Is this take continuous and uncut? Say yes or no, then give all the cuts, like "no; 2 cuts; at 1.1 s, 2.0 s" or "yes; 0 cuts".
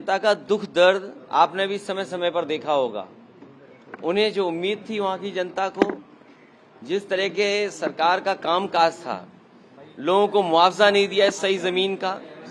yes; 0 cuts